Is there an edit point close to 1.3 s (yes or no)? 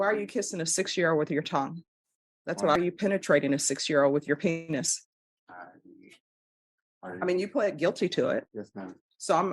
no